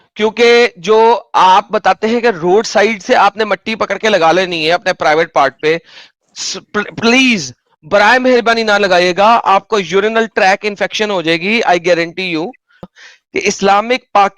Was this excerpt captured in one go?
no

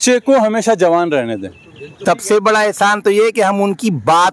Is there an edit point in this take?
yes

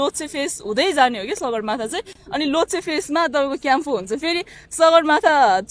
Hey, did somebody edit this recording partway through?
no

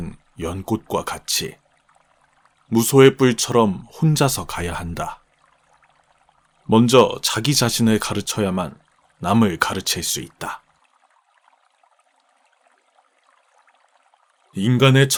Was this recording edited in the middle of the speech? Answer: no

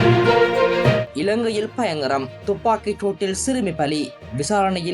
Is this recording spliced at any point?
yes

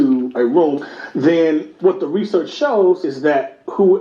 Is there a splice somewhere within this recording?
yes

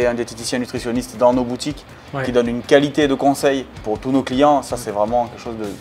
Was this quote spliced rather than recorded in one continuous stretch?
no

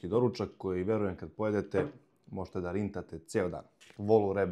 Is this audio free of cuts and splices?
yes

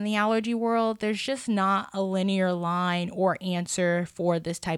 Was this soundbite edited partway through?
no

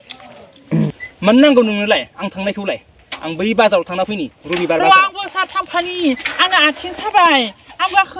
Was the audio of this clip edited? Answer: yes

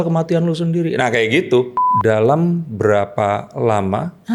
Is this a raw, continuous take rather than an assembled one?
no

